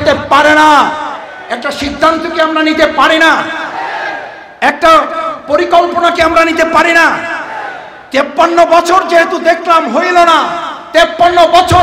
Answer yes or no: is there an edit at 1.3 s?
yes